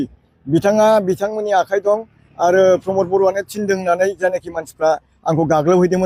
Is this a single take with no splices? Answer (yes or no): yes